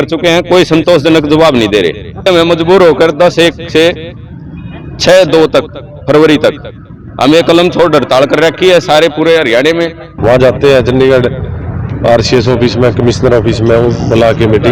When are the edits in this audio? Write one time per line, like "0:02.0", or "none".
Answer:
0:02.3
0:10.1

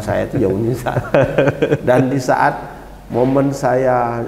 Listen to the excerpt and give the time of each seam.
none

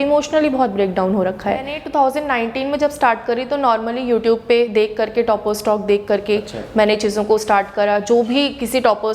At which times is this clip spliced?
0:01.8

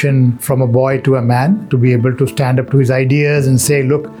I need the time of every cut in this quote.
none

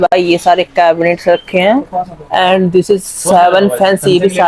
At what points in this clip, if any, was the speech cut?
none

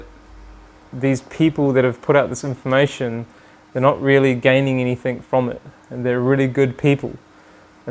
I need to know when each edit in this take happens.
none

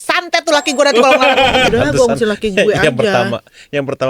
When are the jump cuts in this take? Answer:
0:01.7

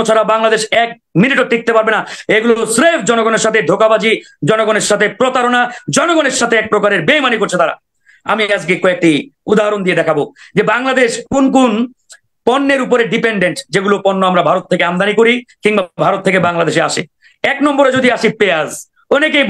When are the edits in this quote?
none

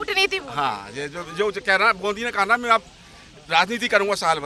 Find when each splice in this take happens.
none

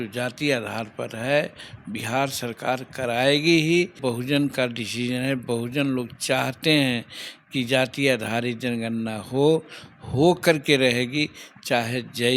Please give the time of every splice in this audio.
0:04.0

